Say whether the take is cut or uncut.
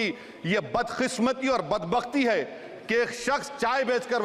uncut